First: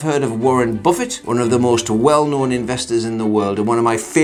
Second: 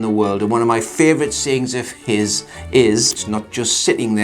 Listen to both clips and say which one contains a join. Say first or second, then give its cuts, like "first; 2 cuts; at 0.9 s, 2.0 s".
second; 1 cut; at 3.2 s